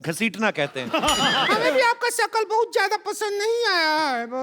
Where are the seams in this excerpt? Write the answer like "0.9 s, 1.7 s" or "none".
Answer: 1.5 s